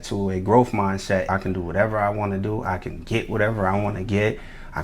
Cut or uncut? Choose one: cut